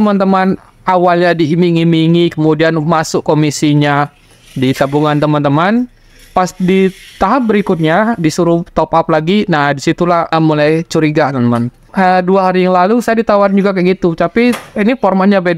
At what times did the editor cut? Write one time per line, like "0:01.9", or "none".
0:10.3
0:11.8